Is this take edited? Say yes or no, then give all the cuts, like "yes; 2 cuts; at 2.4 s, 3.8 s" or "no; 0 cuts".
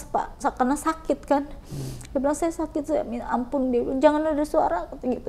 no; 0 cuts